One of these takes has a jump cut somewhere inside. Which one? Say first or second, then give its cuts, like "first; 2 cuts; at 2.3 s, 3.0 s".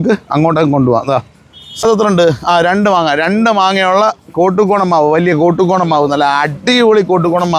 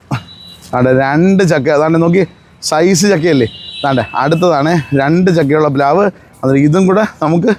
first; 1 cut; at 1.8 s